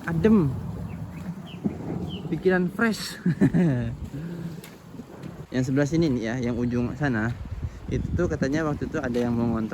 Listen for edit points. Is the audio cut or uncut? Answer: cut